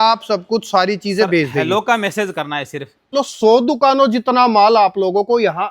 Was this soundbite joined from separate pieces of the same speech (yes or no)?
yes